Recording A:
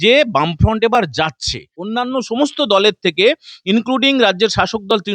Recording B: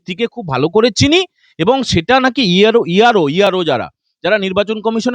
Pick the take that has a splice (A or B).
A